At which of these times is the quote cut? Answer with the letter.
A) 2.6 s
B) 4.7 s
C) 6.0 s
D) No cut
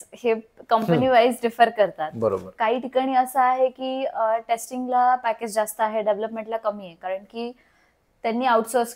D